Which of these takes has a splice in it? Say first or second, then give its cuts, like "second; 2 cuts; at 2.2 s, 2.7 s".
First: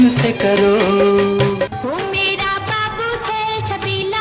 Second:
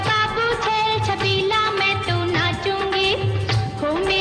first; 1 cut; at 1.7 s